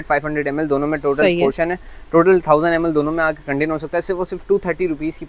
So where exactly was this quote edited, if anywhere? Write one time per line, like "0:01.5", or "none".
none